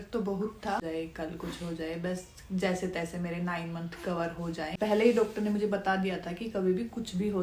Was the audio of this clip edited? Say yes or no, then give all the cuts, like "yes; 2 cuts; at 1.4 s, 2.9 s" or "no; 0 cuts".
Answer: yes; 2 cuts; at 0.8 s, 4.7 s